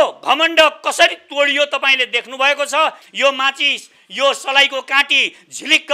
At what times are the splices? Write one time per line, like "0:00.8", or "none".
0:03.1